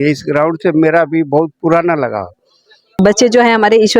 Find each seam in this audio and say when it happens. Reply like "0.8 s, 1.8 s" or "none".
3.0 s